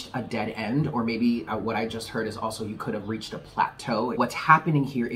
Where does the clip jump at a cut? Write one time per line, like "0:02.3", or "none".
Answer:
0:04.2